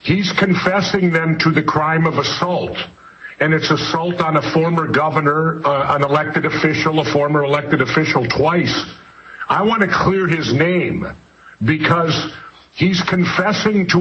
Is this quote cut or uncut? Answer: cut